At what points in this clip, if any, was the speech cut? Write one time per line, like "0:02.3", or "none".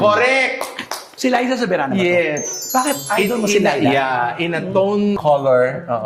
0:01.1

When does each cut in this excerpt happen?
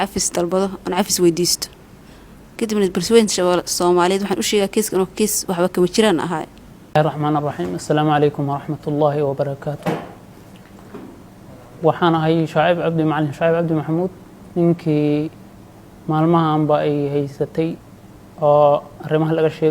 none

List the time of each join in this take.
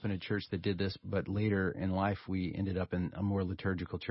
0:01.0
0:02.2

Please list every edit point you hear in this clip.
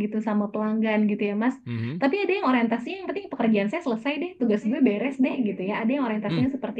none

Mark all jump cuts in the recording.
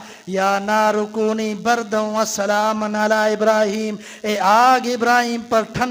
none

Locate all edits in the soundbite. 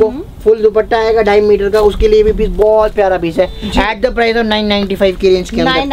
none

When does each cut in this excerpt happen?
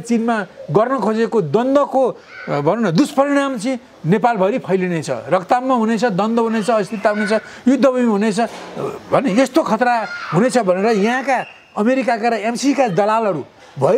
none

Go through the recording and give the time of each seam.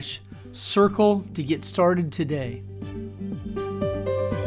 0:02.6

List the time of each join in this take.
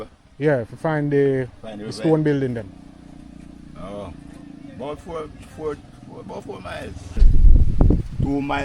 0:07.3

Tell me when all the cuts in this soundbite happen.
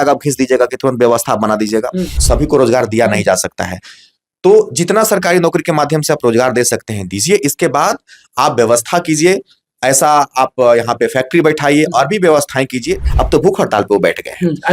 0:02.2
0:13.1

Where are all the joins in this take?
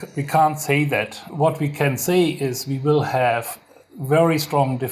0:01.2

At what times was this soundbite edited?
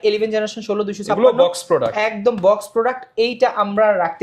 none

